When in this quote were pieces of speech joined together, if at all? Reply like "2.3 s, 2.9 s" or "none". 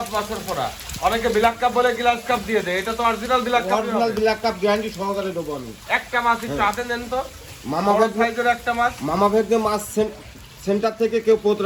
none